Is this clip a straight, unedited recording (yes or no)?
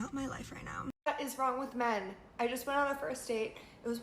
no